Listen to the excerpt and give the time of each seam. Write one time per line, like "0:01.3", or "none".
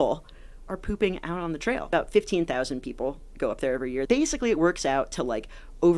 0:01.8
0:04.0